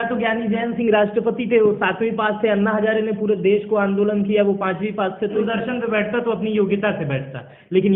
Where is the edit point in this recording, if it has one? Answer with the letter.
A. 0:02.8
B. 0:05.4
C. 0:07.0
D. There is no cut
B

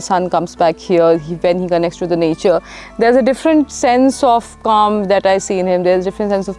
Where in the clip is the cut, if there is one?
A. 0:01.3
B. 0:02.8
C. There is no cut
C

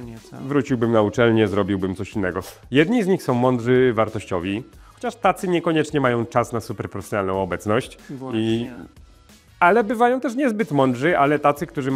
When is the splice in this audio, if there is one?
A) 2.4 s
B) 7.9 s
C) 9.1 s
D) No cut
A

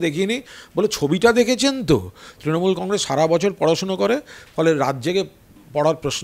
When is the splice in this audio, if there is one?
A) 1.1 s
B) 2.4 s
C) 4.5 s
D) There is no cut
B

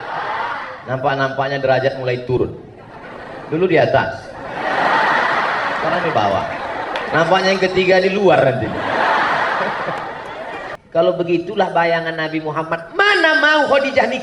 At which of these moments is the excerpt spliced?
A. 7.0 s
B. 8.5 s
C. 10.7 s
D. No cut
C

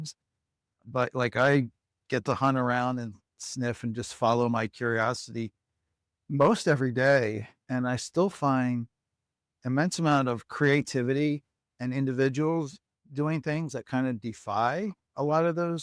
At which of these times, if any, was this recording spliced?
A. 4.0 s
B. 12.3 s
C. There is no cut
C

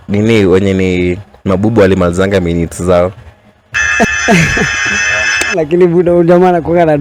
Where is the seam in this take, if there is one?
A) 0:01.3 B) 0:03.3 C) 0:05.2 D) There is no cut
D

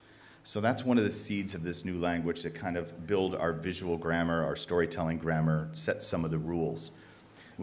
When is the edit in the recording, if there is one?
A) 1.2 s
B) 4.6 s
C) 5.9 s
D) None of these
A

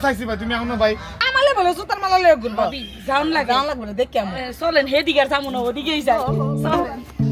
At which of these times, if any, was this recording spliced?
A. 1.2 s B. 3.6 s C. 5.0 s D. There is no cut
A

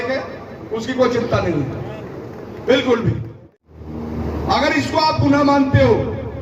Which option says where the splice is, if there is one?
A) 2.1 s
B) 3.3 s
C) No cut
B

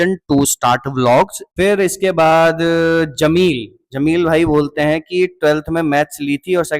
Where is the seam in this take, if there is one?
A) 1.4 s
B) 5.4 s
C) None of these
A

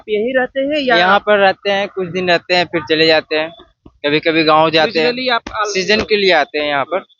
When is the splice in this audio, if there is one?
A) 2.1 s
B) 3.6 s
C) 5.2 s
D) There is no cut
D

